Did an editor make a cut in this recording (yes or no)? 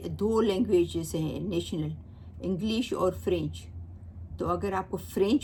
no